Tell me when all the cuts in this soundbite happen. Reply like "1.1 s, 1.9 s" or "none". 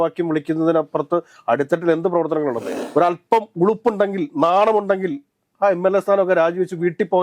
2.8 s